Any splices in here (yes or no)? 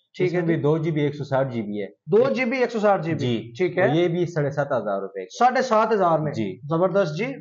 no